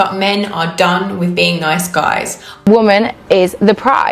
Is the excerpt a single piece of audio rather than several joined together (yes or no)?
no